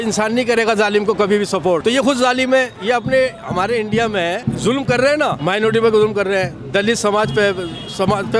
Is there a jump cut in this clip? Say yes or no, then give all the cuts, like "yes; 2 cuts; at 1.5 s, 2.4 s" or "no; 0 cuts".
yes; 3 cuts; at 1.8 s, 4.4 s, 5.4 s